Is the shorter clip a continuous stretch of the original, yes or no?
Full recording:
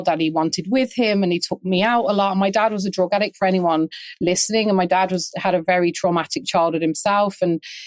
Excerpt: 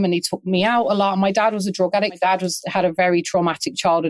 no